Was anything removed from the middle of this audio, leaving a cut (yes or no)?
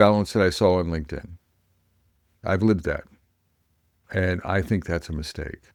no